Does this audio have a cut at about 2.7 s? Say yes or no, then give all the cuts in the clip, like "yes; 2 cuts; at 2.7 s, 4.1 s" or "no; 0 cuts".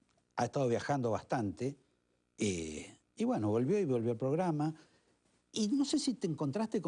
no; 0 cuts